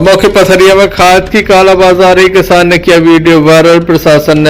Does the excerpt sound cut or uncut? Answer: uncut